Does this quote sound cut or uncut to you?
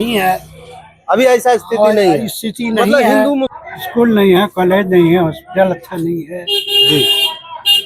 cut